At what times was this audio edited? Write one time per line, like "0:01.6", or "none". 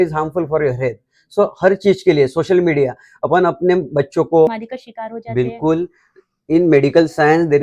0:04.5